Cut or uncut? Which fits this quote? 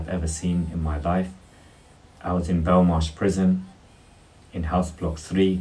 uncut